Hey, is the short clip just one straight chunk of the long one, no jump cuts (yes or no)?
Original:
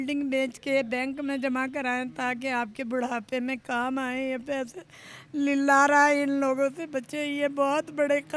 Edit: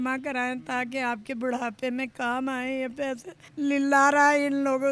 no